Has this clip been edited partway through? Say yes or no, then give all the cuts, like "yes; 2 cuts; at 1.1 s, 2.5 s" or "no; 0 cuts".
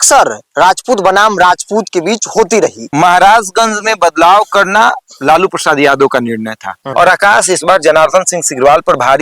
yes; 2 cuts; at 2.8 s, 6.8 s